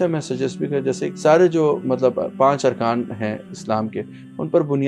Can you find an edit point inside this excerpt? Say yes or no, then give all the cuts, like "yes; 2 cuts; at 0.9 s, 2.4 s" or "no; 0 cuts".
yes; 1 cut; at 1.1 s